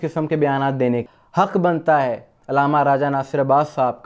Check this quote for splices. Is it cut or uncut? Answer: cut